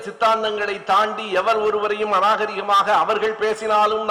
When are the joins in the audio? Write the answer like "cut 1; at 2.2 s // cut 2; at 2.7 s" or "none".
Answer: none